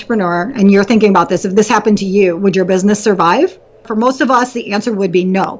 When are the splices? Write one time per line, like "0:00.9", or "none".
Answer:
0:03.8

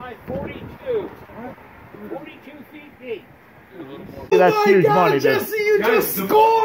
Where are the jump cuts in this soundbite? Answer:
0:04.3

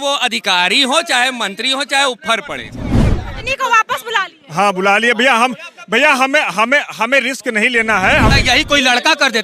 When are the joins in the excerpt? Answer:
0:03.2
0:08.3

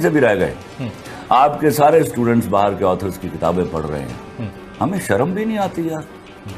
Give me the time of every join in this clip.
none

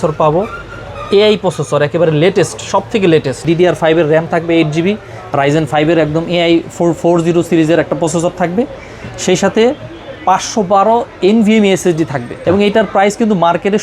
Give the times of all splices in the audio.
0:03.4
0:12.4

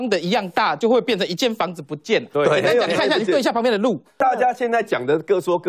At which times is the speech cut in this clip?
0:04.1

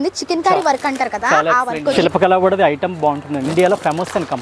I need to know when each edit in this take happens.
0:01.9
0:03.5

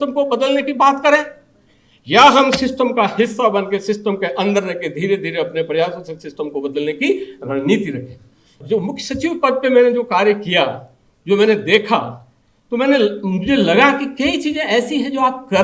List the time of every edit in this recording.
0:08.6

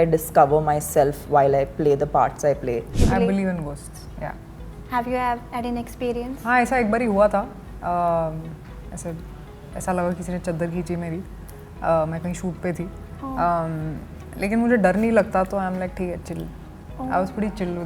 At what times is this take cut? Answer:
0:02.9

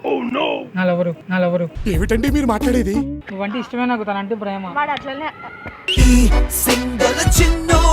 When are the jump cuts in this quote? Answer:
0:03.2

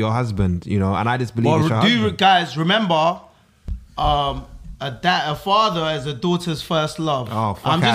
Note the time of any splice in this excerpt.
none

